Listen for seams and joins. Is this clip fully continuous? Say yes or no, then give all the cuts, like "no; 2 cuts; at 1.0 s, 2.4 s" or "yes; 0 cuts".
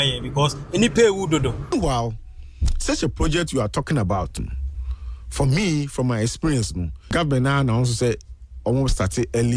no; 2 cuts; at 1.6 s, 7.1 s